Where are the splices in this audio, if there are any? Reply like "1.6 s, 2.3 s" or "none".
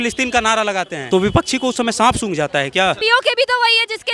1.0 s, 3.0 s